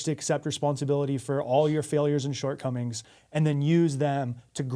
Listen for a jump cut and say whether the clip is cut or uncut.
uncut